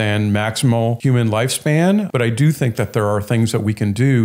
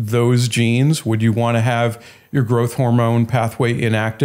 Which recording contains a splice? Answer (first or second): first